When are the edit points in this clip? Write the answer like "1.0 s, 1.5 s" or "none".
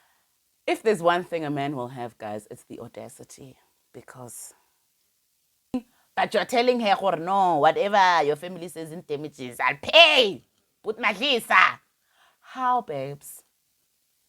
6.0 s